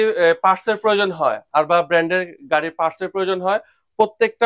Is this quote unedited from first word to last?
yes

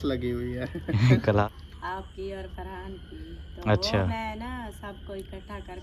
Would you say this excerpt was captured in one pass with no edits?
no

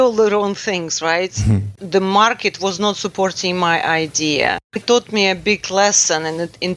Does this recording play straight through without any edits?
no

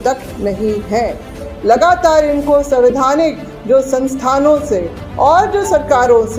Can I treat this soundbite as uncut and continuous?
no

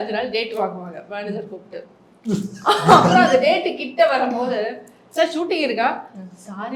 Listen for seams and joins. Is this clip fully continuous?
yes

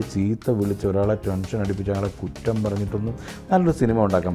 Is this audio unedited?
yes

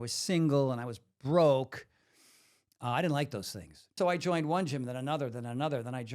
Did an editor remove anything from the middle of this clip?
yes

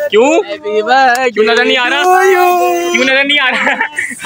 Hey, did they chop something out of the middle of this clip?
no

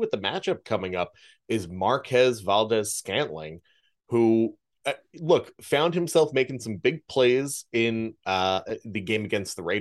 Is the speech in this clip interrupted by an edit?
no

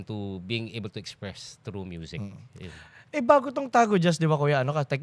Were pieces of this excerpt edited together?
no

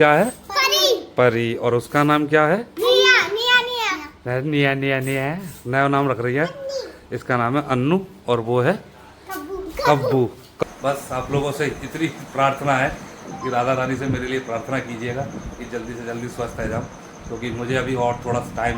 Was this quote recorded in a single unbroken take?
no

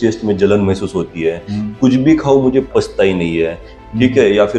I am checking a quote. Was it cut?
yes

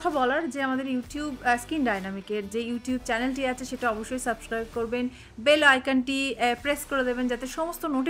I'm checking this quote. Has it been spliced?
no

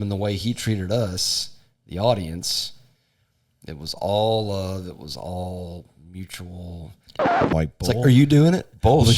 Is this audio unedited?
no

